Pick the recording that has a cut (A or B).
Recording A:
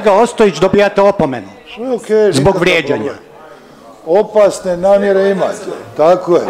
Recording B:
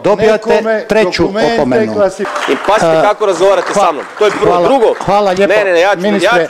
B